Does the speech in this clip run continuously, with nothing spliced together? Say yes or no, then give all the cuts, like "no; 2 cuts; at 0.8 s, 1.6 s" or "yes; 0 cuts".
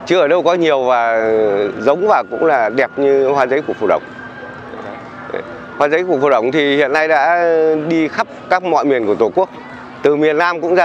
yes; 0 cuts